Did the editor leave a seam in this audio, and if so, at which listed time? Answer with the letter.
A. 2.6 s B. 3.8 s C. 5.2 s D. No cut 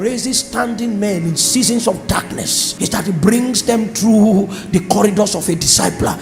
A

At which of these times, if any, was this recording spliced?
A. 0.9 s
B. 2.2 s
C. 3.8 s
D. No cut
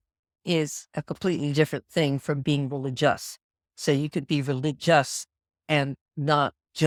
D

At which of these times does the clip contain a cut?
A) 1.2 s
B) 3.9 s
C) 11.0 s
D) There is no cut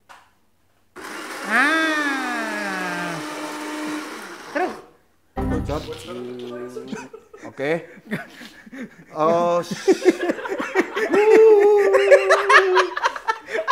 D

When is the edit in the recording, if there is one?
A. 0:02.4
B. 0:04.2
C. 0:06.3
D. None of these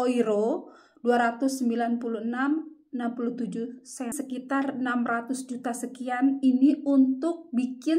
B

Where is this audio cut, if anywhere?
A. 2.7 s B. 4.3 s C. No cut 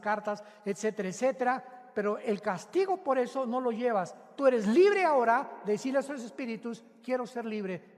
B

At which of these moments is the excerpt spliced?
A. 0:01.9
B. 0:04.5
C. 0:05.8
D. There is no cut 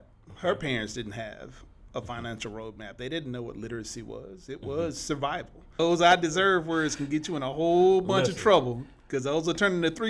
C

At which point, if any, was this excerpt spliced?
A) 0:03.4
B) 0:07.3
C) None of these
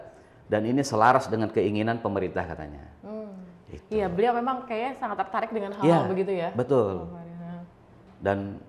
C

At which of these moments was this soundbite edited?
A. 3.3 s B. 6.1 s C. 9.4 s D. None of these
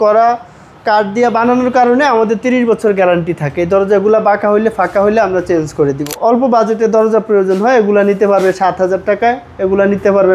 B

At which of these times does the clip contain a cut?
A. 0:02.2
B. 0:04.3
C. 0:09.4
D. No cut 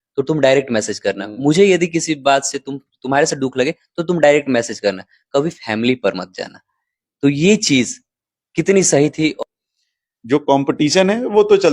C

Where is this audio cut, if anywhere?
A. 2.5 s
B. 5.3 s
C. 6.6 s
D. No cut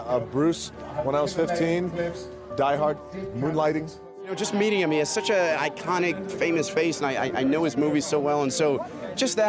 D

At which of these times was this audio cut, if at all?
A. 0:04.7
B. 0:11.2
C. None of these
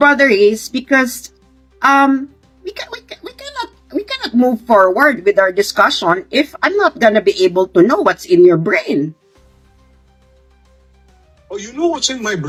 C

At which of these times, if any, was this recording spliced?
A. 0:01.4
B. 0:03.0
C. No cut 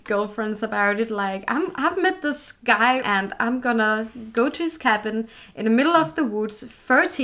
B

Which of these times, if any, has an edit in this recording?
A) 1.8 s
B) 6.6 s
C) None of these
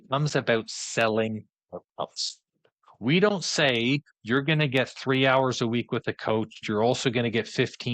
B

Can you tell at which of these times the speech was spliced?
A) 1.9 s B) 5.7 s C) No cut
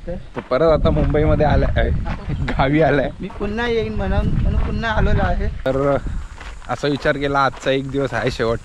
B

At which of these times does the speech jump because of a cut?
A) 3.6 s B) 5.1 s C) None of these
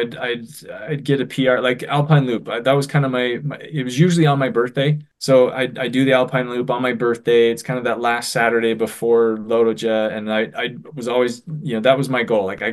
B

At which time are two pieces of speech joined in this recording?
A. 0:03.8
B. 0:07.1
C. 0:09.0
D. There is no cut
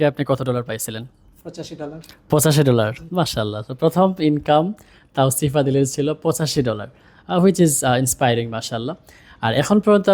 D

